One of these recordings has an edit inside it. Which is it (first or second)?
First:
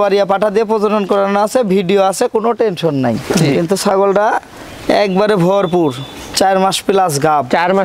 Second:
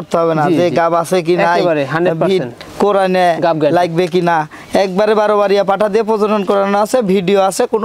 first